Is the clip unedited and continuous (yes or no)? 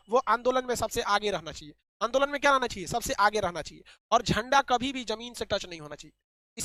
yes